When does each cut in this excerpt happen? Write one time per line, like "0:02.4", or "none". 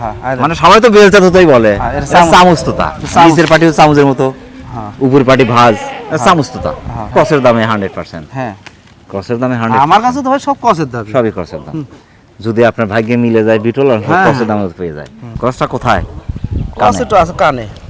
0:07.0
0:15.3